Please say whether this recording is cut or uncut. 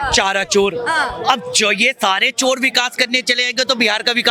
uncut